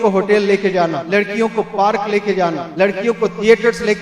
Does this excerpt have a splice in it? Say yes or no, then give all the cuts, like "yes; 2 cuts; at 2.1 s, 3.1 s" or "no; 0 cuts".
yes; 2 cuts; at 1.0 s, 2.6 s